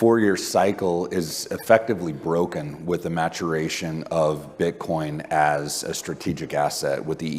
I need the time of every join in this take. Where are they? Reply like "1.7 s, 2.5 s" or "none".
none